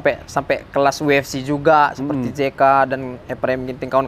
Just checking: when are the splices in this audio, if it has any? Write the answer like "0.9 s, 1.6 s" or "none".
none